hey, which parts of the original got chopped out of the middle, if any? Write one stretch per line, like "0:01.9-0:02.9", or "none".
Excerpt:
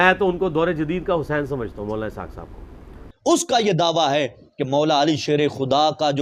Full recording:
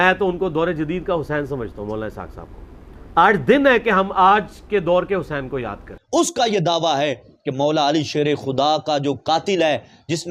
0:02.9-0:05.8